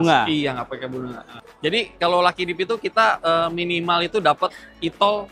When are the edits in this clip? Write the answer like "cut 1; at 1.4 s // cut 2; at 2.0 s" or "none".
cut 1; at 1.2 s